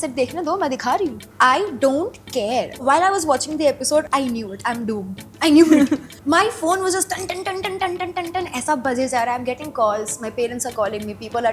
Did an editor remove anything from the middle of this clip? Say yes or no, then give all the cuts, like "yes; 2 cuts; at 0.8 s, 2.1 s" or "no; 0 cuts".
yes; 4 cuts; at 1.2 s, 2.8 s, 4.1 s, 6.1 s